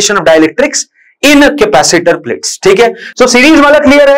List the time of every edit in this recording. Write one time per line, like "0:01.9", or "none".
none